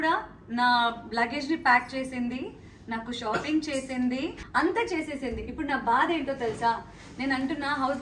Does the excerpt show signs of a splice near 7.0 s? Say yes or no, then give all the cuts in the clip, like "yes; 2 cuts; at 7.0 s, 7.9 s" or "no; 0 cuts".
no; 1 cut; at 4.4 s